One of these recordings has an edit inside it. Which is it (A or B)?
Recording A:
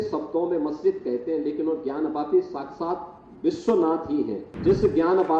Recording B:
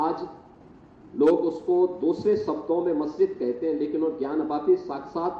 A